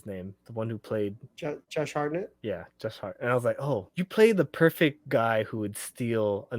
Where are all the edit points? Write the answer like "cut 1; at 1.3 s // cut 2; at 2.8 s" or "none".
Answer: cut 1; at 1.6 s // cut 2; at 2.3 s // cut 3; at 3.9 s